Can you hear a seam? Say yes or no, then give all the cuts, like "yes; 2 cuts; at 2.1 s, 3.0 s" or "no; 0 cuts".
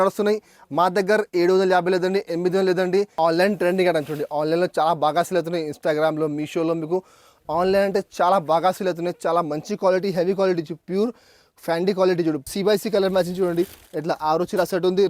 yes; 2 cuts; at 3.1 s, 12.4 s